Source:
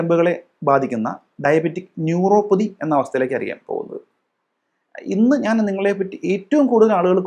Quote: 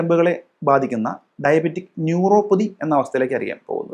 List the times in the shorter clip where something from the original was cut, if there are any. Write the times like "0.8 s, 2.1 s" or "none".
none